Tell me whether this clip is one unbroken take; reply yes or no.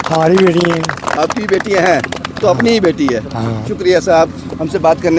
yes